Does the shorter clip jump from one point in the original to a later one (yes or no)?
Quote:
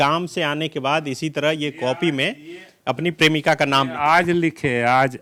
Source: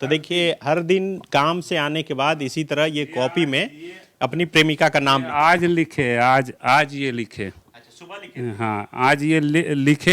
no